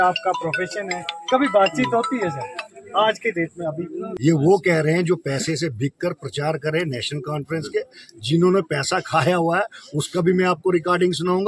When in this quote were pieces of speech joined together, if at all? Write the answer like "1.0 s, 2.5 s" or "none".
4.0 s